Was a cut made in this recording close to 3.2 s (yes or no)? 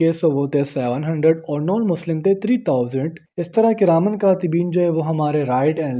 yes